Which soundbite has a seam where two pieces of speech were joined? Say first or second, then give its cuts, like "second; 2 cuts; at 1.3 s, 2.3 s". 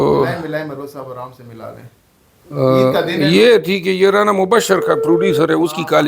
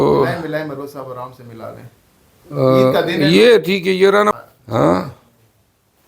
second; 1 cut; at 4.2 s